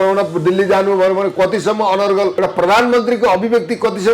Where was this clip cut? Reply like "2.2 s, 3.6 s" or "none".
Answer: 2.3 s